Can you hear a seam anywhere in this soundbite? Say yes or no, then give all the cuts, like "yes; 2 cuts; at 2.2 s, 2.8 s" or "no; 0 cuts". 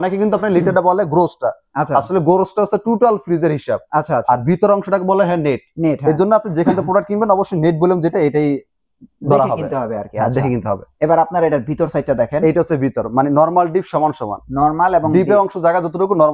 no; 0 cuts